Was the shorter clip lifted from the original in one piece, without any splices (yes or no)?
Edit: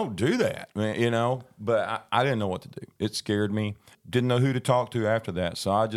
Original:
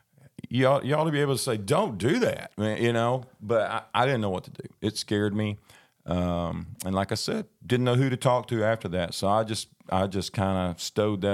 no